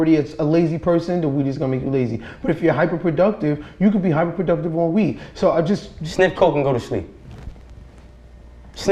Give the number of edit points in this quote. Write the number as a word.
zero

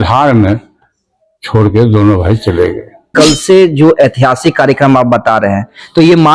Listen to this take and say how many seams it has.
one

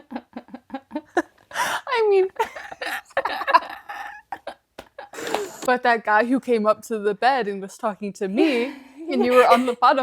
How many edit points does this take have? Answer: one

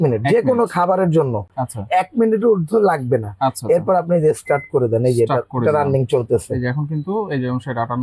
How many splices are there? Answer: zero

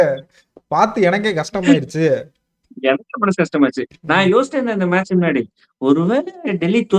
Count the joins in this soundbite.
zero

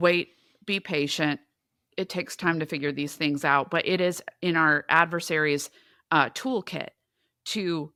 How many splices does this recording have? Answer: zero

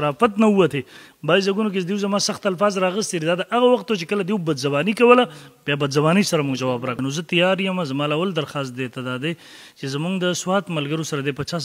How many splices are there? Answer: one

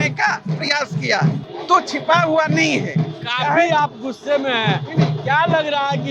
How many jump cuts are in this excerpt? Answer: zero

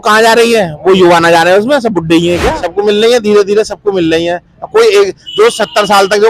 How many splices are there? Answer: one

